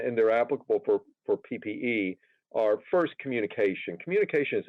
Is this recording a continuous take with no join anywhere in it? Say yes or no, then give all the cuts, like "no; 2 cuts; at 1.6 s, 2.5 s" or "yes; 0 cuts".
yes; 0 cuts